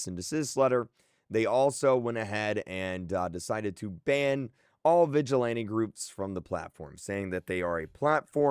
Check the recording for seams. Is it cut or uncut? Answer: cut